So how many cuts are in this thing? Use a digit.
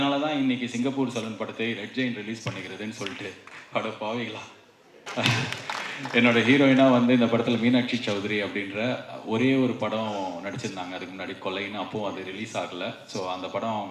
1